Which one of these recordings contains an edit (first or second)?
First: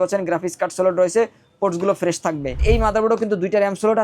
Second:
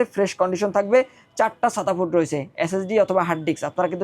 first